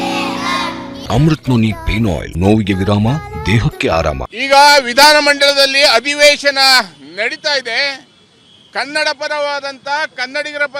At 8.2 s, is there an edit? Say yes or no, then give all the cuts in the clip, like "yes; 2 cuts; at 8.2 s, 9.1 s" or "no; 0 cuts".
no; 3 cuts; at 1.0 s, 2.3 s, 4.4 s